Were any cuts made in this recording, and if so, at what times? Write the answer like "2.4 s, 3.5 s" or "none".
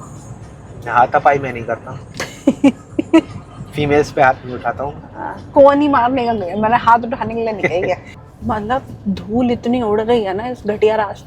8.1 s